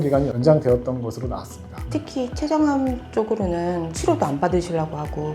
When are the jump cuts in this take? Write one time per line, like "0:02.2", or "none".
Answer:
0:01.8
0:03.9